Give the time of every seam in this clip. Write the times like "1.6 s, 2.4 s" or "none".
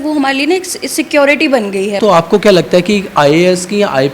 2.0 s